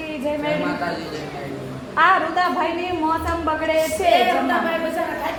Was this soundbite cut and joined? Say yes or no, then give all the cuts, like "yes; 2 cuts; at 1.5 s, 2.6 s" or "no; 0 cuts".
no; 0 cuts